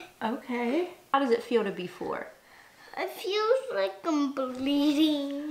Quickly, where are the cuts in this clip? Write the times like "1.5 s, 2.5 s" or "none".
1.0 s